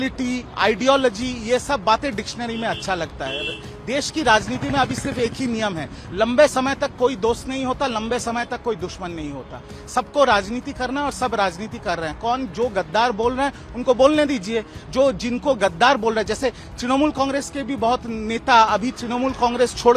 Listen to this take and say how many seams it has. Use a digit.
0